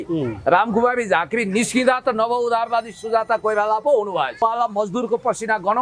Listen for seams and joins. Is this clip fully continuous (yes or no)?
no